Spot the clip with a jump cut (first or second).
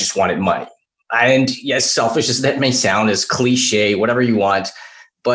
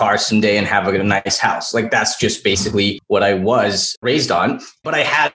second